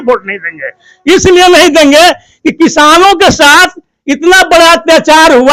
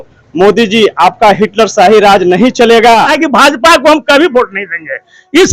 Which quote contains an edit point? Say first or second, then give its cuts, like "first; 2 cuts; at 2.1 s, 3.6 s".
second; 1 cut; at 3.1 s